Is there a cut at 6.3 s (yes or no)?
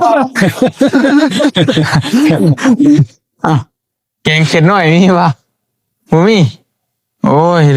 no